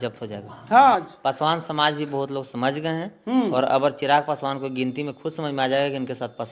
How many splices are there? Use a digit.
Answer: 1